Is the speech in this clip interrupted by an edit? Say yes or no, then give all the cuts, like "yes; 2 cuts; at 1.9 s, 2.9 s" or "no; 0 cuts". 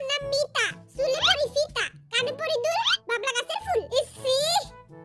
no; 0 cuts